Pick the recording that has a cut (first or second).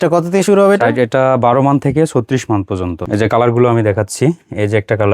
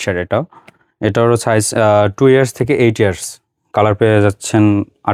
first